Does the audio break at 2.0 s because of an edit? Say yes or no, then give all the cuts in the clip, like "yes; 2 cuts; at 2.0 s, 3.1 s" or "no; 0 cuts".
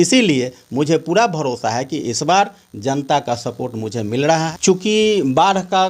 no; 1 cut; at 4.5 s